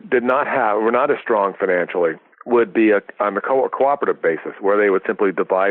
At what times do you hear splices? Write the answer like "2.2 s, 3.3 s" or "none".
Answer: 2.3 s